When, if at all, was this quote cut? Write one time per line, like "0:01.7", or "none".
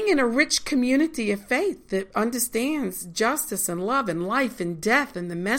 none